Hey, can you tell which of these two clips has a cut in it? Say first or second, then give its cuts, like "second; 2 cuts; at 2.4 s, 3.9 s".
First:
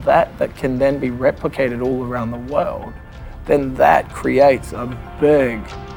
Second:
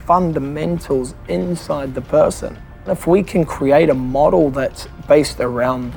second; 1 cut; at 3.0 s